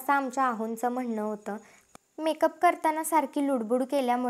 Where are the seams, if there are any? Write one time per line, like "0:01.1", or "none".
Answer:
0:01.7